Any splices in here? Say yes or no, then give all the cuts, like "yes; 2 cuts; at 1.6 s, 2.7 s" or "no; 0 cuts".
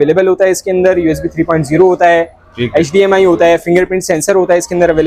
no; 0 cuts